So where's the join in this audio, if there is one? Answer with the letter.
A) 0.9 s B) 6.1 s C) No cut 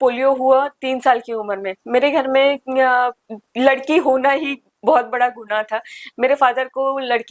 C